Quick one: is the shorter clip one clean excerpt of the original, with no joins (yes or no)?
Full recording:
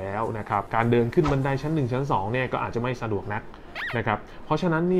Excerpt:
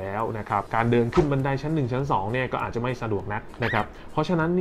no